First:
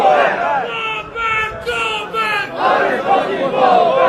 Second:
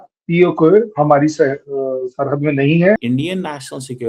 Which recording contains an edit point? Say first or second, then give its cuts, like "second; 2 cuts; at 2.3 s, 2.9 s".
second; 1 cut; at 3.0 s